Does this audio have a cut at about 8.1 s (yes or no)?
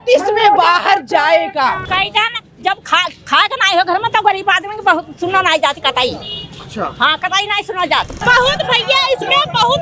yes